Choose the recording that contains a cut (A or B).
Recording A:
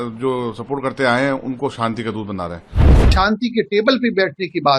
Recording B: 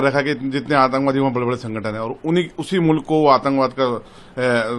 A